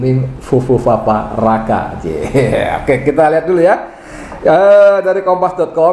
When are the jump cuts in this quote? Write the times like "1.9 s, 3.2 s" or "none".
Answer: none